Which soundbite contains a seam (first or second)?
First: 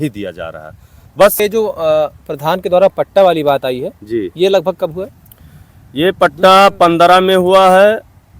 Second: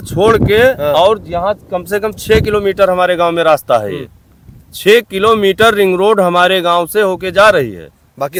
first